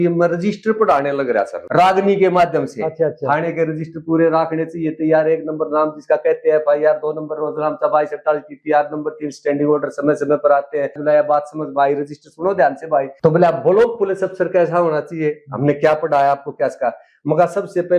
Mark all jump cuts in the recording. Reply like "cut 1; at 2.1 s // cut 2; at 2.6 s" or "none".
cut 1; at 1.6 s // cut 2; at 11.0 s // cut 3; at 13.1 s